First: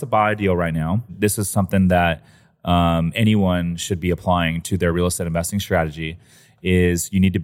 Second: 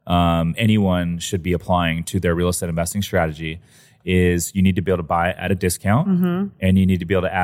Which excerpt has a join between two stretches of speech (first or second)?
first